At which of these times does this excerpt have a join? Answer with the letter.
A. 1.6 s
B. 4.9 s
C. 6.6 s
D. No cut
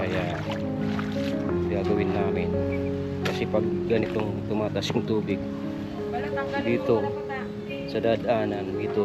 D